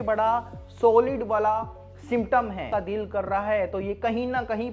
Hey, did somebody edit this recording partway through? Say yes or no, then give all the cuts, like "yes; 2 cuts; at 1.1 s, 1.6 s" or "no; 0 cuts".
yes; 1 cut; at 2.7 s